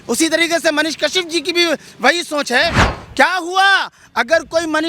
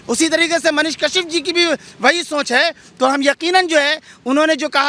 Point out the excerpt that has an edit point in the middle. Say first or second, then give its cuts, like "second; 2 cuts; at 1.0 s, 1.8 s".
first; 1 cut; at 2.8 s